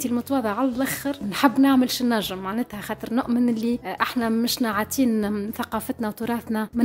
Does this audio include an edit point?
no; 0 cuts

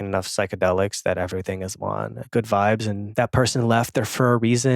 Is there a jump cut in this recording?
yes; 2 cuts; at 2.2 s, 3.1 s

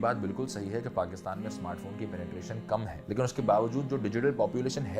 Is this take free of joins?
no; 1 cut; at 2.9 s

